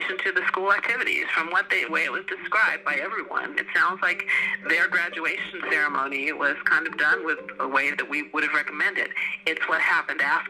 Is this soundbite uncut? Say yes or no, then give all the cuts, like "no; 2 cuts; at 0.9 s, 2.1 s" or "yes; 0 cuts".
no; 1 cut; at 9.2 s